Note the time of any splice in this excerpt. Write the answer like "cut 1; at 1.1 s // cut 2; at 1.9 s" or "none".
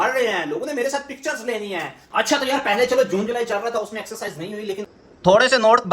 cut 1; at 2.0 s // cut 2; at 4.8 s